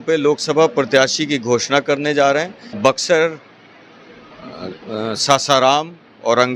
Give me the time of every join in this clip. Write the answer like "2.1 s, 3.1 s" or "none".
2.6 s